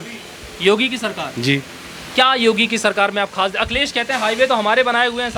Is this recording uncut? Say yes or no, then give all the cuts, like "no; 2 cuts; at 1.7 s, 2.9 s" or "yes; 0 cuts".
yes; 0 cuts